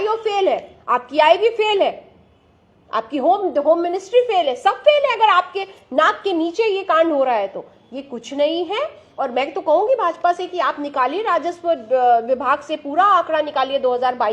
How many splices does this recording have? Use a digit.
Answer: 0